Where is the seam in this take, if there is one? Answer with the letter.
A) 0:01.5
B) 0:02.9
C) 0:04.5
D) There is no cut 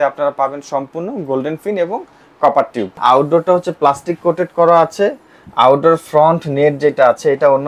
B